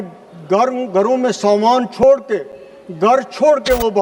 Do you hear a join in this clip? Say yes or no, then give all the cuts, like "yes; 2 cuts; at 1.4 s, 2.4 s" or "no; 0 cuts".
no; 0 cuts